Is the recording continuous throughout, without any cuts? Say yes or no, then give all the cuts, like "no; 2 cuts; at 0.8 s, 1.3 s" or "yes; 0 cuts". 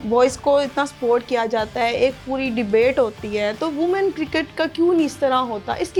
yes; 0 cuts